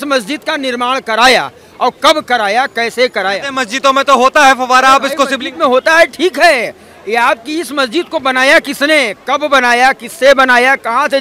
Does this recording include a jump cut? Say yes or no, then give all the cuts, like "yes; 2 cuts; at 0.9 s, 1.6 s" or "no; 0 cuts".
yes; 1 cut; at 3.4 s